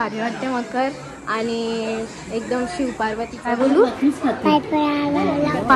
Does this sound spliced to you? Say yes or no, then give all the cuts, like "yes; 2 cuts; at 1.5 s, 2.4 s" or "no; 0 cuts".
yes; 1 cut; at 3.4 s